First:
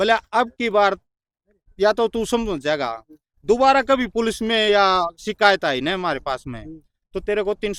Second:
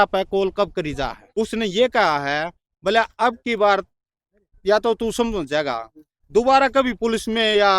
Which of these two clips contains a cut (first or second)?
second